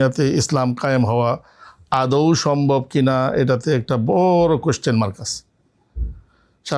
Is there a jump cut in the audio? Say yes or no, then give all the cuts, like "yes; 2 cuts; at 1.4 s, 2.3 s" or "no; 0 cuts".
no; 0 cuts